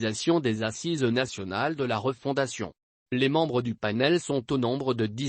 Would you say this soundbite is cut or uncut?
cut